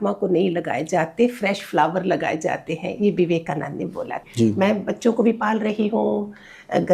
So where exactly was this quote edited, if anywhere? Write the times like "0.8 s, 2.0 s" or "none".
4.2 s